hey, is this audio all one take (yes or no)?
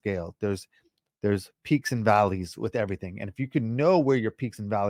yes